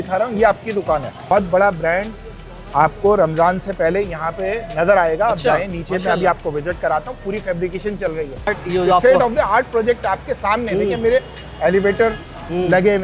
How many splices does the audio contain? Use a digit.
2